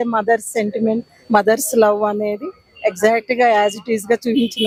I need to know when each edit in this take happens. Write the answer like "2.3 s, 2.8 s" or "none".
none